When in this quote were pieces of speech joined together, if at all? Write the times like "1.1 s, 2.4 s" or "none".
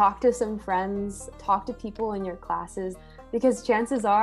3.0 s